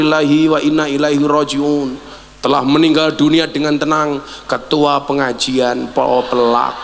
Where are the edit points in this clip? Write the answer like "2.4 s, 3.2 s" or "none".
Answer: none